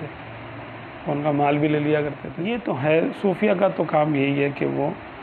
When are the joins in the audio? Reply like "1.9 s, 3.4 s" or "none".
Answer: 2.3 s